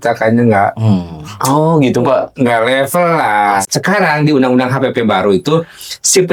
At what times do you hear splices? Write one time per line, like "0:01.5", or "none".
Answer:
0:03.6